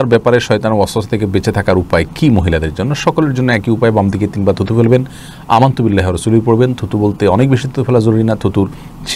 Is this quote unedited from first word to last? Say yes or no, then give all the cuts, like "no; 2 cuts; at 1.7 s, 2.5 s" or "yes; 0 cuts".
yes; 0 cuts